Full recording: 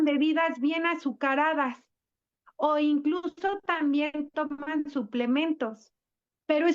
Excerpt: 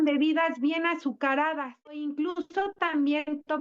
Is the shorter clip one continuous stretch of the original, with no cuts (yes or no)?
no